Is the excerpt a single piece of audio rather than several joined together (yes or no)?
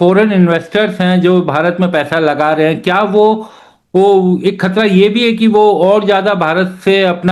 yes